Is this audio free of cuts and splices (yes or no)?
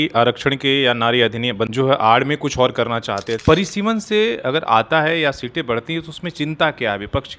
no